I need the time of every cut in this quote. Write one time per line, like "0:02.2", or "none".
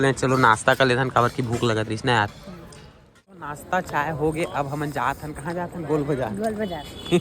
0:03.5